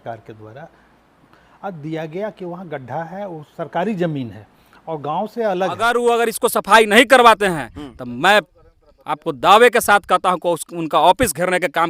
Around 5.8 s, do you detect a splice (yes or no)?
yes